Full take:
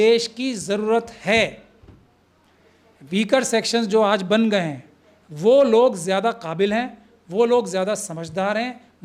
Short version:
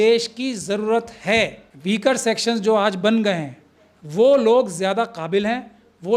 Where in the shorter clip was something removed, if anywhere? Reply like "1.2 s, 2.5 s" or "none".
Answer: 1.7 s